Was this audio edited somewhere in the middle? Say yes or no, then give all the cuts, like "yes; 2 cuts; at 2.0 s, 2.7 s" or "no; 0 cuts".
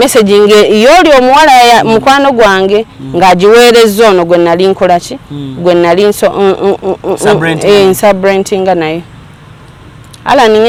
no; 0 cuts